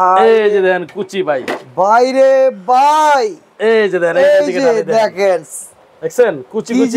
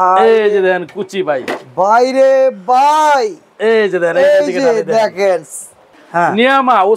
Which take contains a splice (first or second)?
second